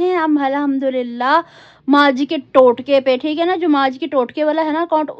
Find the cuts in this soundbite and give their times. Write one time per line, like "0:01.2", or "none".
none